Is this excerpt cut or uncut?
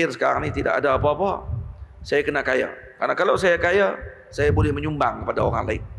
uncut